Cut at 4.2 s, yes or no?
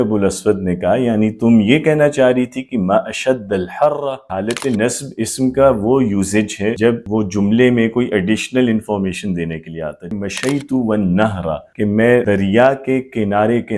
yes